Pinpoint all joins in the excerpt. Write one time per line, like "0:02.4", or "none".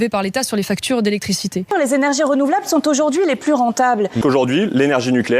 0:01.6

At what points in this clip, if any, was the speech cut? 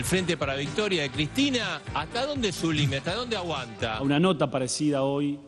0:04.0

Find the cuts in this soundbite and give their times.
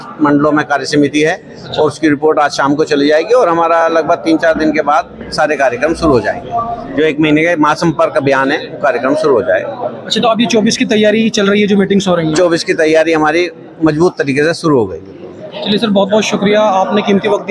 none

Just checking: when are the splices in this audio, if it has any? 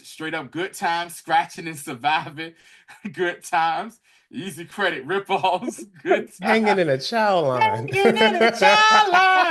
none

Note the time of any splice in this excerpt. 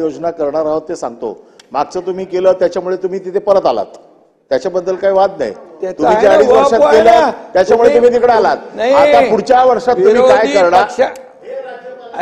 none

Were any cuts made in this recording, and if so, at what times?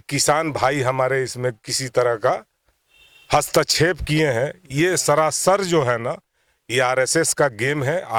none

